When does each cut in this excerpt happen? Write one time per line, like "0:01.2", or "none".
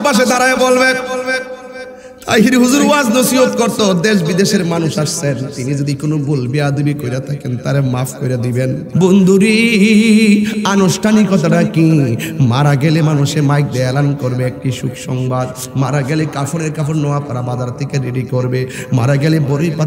0:08.8

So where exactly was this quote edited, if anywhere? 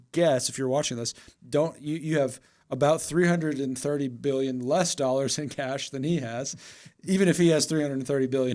none

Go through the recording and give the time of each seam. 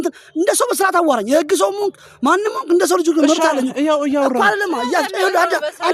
none

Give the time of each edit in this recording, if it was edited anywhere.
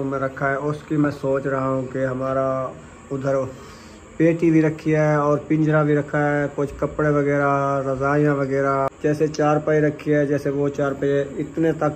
0:08.9

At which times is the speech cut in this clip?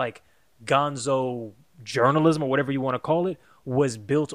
none

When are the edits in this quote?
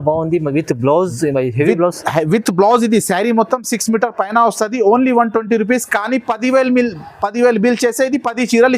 none

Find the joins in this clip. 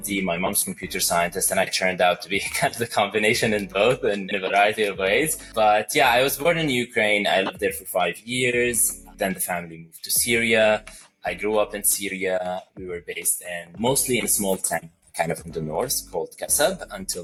none

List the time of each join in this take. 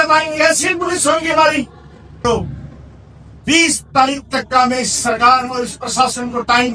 0:02.1

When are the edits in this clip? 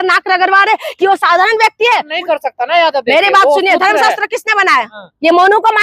0:02.1

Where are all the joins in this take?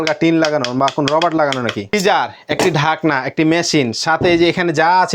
0:01.9

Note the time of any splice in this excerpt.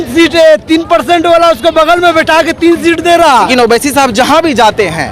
0:03.5

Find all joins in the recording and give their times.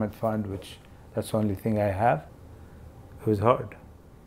0:02.3

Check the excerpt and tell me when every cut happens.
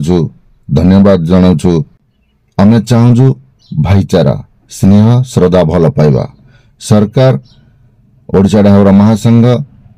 0:02.0

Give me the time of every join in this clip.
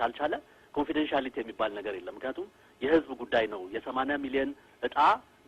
none

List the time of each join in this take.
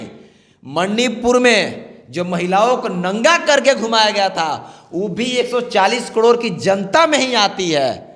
none

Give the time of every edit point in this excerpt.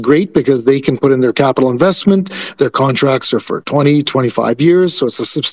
none

